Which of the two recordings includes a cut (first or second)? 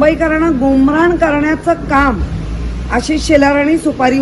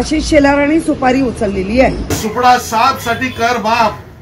second